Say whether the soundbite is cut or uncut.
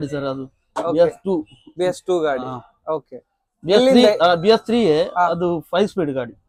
uncut